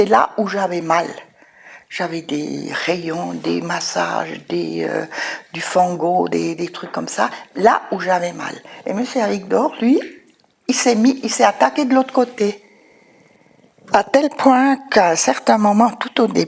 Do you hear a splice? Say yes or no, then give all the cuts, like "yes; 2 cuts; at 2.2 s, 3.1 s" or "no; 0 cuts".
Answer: no; 0 cuts